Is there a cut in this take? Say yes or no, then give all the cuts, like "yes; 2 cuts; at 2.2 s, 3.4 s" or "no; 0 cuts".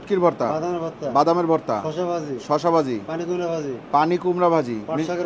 no; 0 cuts